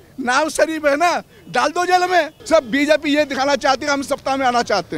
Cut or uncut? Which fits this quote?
cut